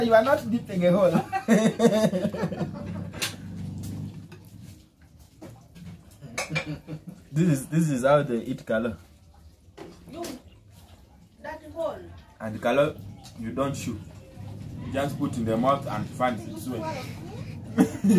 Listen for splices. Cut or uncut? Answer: cut